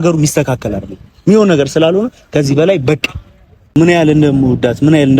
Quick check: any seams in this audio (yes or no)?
yes